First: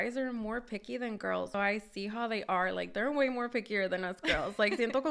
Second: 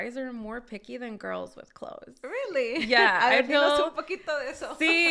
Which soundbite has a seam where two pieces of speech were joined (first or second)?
first